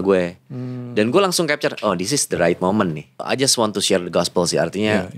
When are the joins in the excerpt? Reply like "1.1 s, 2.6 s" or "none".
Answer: 3.2 s